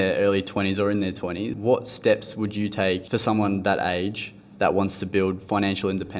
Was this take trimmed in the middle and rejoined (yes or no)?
yes